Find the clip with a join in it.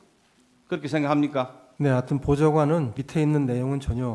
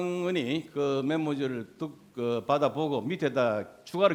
first; 2 cuts; at 1.6 s, 3.0 s

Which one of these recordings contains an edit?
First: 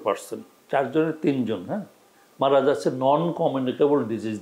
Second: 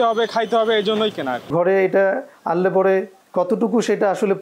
second; 3 cuts; at 1.5 s, 2.3 s, 3.2 s

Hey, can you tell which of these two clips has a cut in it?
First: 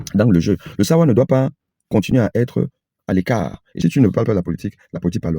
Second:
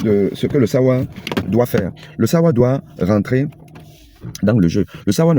first; 1 cut; at 3.6 s

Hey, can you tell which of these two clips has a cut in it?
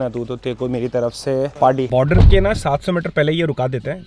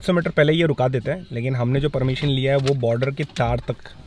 first; 1 cut; at 1.9 s

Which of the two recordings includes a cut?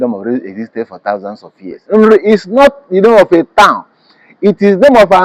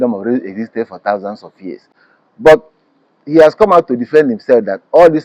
first; 1 cut; at 1.8 s

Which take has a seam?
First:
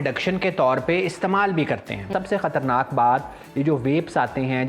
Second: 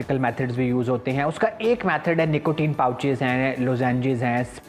first; 1 cut; at 2.0 s

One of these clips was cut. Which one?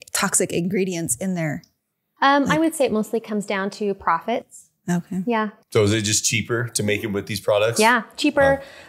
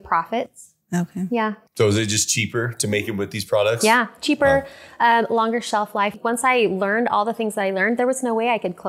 second; 1 cut; at 6.1 s

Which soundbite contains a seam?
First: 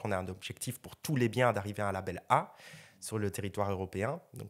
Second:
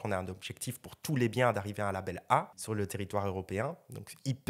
second; 1 cut; at 2.6 s

